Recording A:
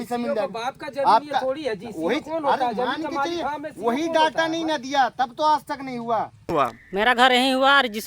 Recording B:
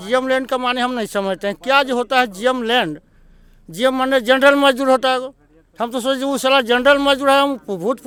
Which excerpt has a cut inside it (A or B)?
A